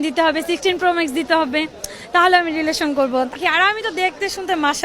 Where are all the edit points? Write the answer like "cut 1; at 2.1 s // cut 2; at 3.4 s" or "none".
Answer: cut 1; at 3.4 s